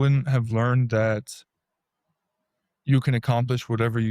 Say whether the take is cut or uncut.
uncut